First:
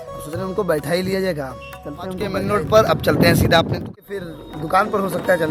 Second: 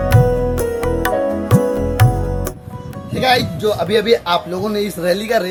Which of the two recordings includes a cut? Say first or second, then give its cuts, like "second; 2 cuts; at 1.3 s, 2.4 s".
first; 2 cuts; at 2.4 s, 3.9 s